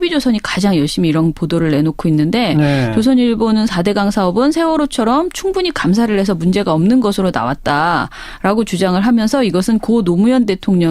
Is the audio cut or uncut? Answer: cut